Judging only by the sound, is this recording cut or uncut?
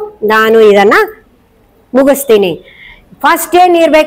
uncut